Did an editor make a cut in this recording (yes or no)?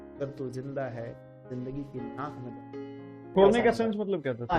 yes